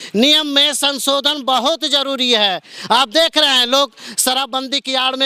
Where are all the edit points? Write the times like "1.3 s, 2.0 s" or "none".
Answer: none